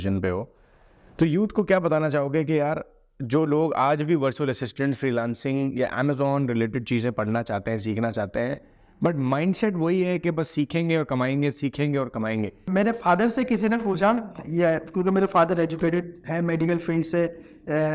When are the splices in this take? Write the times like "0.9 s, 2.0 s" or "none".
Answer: 12.6 s